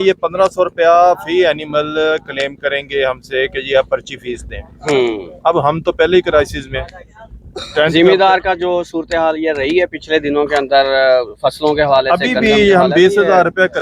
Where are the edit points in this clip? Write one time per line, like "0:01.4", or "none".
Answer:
none